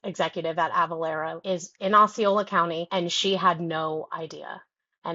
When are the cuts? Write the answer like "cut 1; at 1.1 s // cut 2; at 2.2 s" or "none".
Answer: cut 1; at 1.4 s // cut 2; at 2.8 s